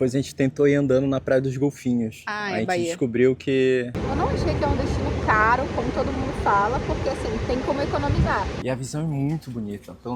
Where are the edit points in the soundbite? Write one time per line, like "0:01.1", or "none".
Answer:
0:03.9
0:08.6